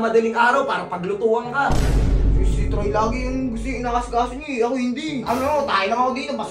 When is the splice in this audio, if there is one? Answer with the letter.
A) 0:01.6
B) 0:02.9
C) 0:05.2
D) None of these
C